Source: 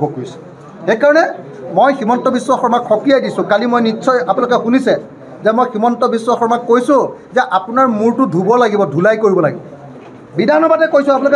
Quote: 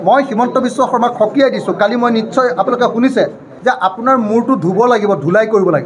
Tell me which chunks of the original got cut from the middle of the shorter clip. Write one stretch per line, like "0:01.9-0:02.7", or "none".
0:05.2-0:07.2